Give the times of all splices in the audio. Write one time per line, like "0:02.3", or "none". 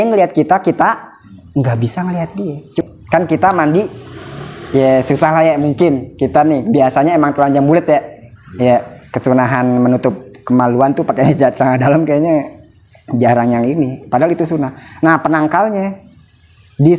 0:02.8